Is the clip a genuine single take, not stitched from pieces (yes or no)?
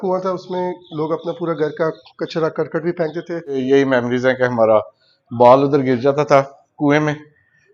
no